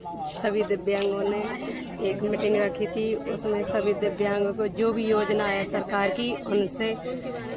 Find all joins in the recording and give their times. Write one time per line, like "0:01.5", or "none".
none